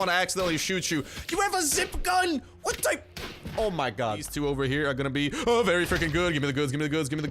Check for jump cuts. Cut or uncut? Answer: cut